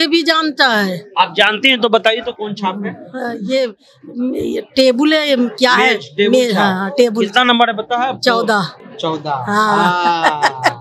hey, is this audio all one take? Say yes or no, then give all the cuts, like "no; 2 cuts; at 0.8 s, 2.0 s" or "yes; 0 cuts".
yes; 0 cuts